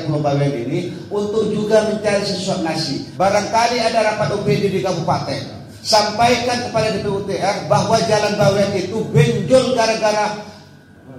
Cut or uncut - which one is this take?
cut